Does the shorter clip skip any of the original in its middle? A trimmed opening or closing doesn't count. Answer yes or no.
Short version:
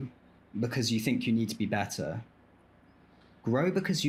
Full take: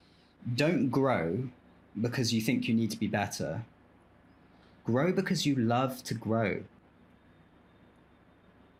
no